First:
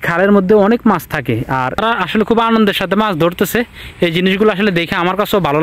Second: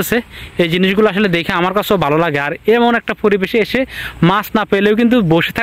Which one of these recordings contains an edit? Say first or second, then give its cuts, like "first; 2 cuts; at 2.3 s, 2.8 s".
first; 1 cut; at 1.8 s